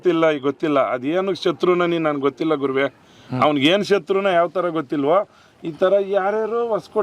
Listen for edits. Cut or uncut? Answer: uncut